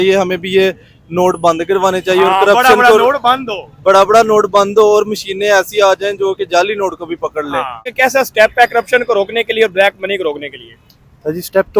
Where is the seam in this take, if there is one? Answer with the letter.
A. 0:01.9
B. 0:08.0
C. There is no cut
B